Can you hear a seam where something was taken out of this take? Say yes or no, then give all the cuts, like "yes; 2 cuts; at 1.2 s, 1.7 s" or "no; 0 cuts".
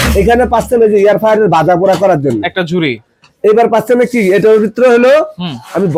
no; 0 cuts